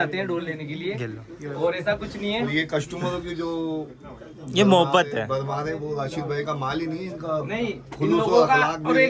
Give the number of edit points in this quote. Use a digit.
0